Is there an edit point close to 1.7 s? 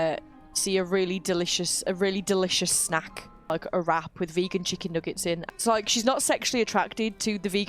no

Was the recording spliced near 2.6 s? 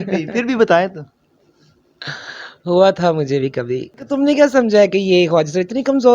no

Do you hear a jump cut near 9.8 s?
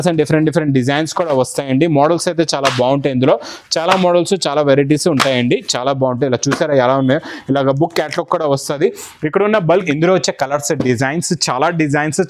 yes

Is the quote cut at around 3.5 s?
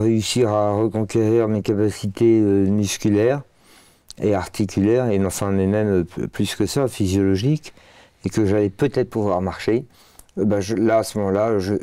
no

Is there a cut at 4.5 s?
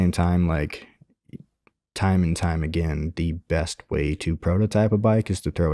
no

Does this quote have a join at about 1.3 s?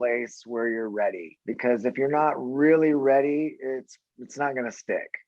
yes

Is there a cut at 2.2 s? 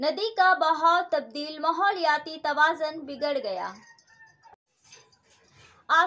no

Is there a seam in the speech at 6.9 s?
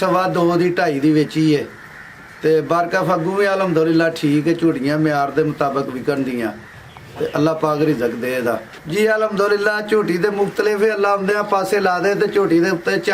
no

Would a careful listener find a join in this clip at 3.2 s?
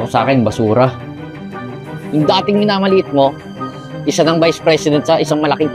no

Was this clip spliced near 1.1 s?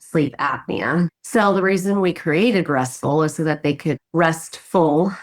yes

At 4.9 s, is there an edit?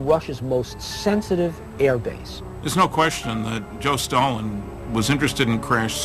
no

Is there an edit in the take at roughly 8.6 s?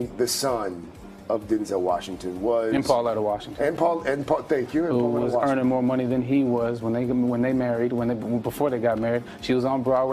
no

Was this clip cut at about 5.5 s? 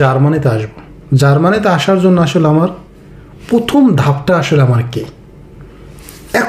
no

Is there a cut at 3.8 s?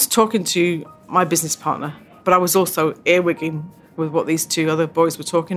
no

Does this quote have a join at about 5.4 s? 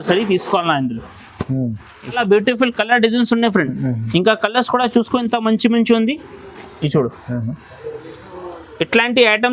no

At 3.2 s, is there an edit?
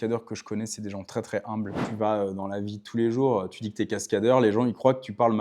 no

